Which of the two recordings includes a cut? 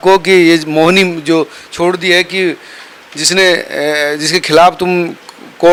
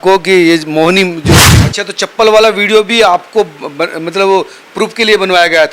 second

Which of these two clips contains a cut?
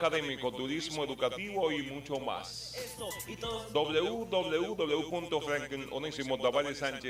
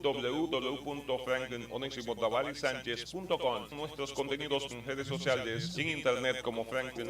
second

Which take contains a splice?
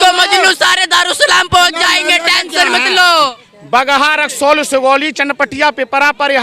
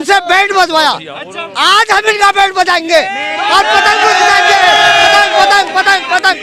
first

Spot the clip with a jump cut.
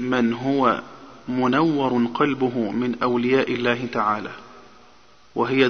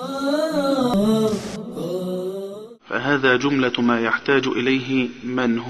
second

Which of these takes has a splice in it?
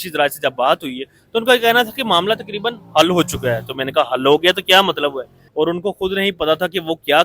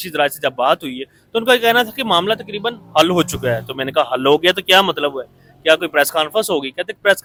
first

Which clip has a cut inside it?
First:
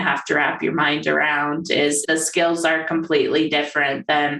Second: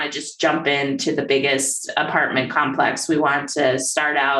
first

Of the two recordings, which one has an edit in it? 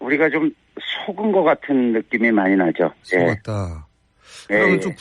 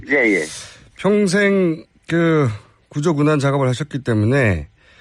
first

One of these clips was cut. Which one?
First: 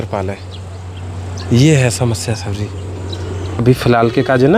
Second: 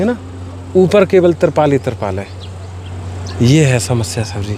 first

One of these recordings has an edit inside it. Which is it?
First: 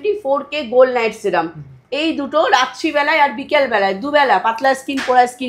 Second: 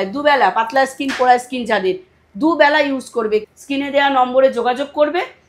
second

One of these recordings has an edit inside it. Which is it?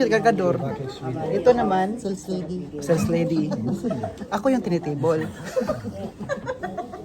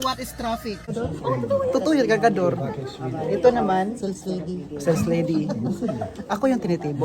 second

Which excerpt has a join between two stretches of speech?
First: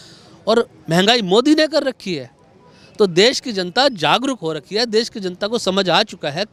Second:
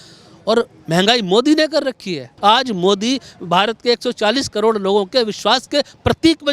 second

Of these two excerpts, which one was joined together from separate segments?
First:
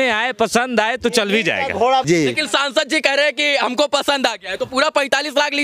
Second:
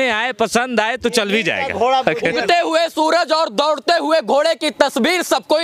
first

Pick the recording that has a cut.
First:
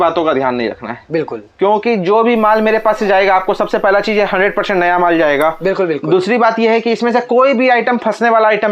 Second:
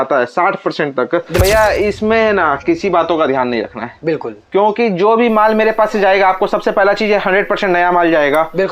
second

